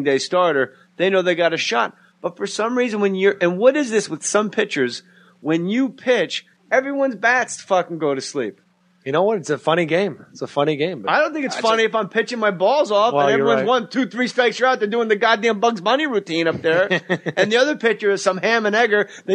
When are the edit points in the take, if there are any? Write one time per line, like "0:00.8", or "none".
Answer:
0:18.0